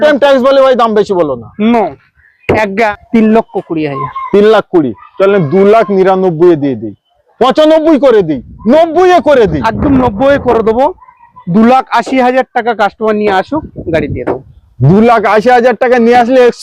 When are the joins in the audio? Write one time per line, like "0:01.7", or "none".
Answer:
0:02.9